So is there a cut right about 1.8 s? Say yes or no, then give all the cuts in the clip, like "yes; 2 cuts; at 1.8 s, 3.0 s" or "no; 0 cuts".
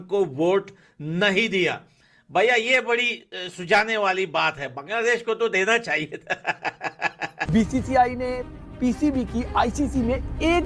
no; 1 cut; at 7.4 s